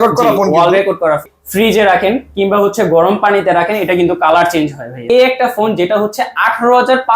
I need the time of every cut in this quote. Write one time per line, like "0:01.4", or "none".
0:01.4
0:05.0